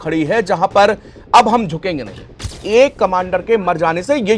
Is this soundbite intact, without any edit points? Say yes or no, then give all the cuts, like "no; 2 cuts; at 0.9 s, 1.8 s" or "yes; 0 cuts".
no; 1 cut; at 2.5 s